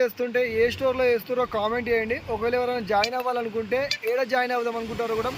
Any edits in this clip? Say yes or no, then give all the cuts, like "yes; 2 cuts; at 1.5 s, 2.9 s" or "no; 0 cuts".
no; 0 cuts